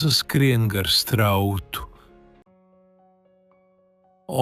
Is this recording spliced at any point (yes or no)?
no